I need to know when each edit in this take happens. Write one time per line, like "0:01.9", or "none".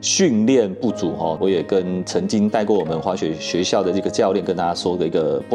0:01.4